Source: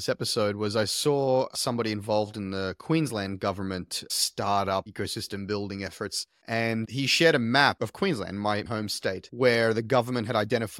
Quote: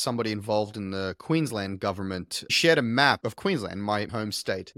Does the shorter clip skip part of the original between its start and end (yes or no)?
yes